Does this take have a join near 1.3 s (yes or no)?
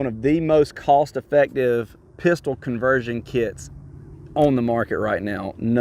no